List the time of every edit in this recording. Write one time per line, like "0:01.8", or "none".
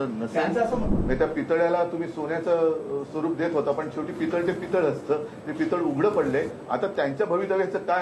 0:00.9